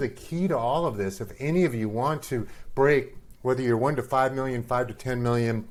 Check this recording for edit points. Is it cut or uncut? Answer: uncut